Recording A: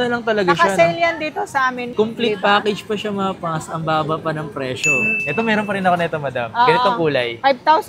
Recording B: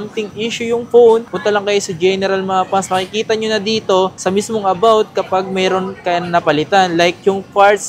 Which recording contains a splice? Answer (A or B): A